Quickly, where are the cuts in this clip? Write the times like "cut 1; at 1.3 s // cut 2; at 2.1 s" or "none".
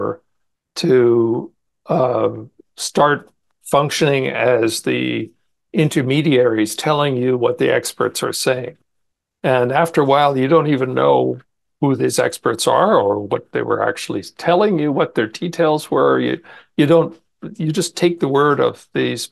none